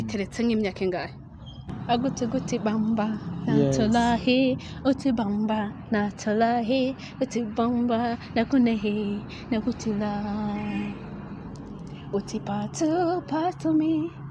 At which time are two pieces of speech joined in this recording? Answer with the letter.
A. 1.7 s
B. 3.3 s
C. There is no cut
A